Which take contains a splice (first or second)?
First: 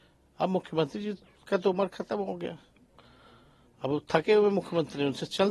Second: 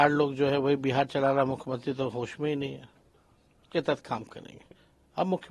second